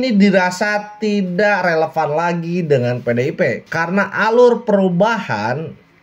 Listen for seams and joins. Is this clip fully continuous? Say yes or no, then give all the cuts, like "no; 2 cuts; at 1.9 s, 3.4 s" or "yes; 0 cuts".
yes; 0 cuts